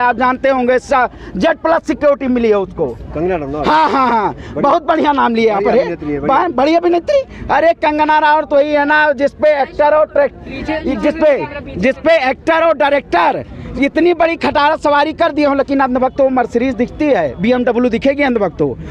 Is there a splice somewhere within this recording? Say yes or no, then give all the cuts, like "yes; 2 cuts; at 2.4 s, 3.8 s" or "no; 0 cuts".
no; 0 cuts